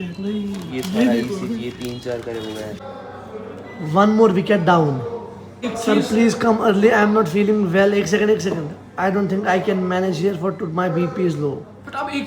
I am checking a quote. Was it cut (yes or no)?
yes